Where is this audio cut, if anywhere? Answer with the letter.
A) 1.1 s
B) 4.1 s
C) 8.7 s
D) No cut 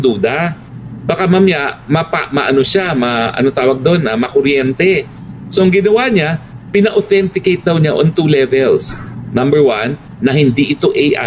D